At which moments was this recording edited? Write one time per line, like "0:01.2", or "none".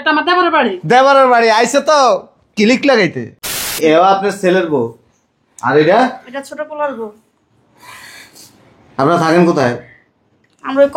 0:03.8